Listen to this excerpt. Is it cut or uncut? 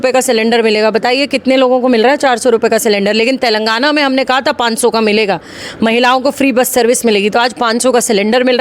uncut